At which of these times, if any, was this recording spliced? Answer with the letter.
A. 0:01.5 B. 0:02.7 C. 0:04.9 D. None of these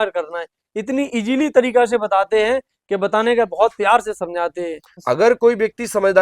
C